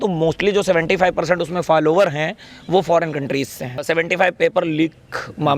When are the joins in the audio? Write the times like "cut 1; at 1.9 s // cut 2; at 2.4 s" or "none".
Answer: cut 1; at 3.8 s